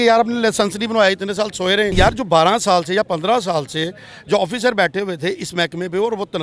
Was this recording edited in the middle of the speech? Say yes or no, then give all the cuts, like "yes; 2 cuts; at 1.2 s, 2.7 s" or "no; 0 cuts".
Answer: yes; 1 cut; at 1.9 s